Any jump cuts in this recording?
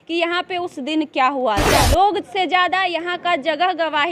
yes; 1 cut; at 1.7 s

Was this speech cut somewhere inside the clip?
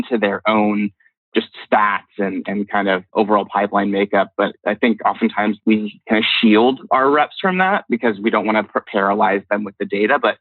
yes; 4 cuts; at 1.1 s, 3.1 s, 4.6 s, 5.6 s

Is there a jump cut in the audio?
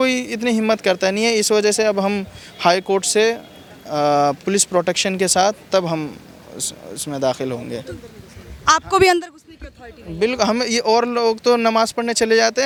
no; 0 cuts

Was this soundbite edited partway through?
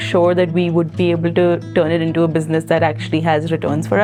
no; 0 cuts

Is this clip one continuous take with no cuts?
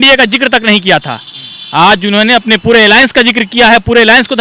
yes; 0 cuts

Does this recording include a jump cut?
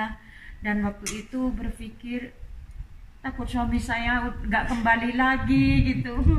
no; 0 cuts

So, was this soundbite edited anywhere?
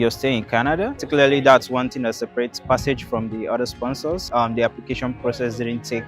yes; 2 cuts; at 1.0 s, 4.2 s

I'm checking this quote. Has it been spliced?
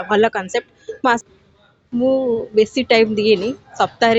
yes; 1 cut; at 1.2 s

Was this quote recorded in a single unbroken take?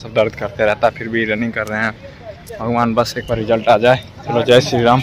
no; 1 cut; at 4.1 s

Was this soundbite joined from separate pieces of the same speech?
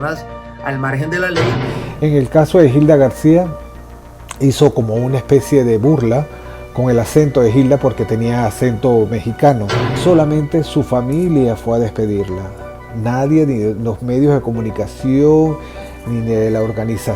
yes; 2 cuts; at 1.6 s, 10.0 s

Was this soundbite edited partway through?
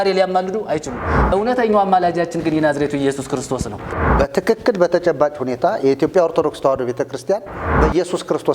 yes; 2 cuts; at 4.0 s, 7.6 s

